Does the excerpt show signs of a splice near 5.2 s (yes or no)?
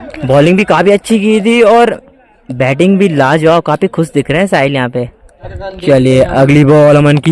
yes